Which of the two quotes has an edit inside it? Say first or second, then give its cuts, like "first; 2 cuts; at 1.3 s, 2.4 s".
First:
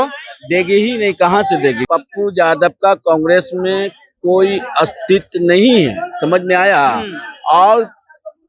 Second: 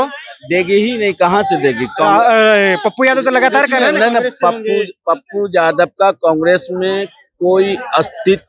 first; 1 cut; at 1.8 s